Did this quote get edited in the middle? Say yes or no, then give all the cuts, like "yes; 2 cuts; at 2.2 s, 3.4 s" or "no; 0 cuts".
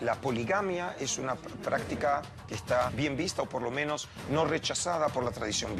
yes; 1 cut; at 2.9 s